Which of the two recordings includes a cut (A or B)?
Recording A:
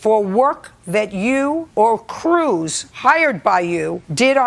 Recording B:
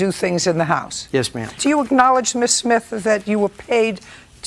B